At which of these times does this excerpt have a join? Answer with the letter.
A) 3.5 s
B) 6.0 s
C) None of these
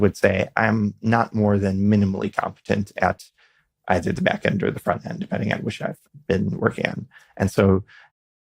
B